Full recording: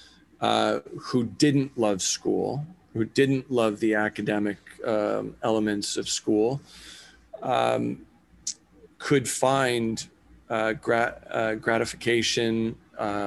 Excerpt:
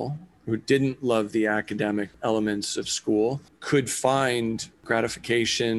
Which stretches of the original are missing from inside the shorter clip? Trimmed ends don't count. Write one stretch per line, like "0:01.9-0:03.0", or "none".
0:04.6-0:05.3
0:06.7-0:08.9
0:10.2-0:11.6